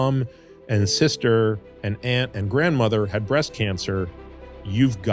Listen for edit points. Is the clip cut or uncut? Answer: uncut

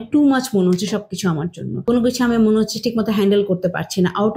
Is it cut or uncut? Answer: cut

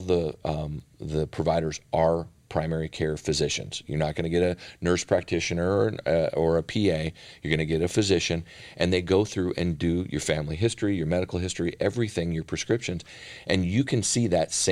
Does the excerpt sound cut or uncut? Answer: uncut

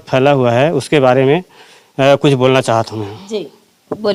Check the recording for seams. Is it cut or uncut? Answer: uncut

